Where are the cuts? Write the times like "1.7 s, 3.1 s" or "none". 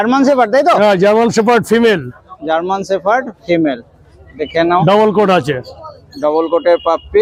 none